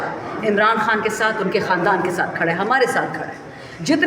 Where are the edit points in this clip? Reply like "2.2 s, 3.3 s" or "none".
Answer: none